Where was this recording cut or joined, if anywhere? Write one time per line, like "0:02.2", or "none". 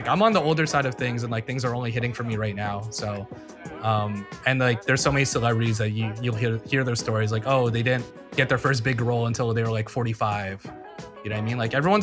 none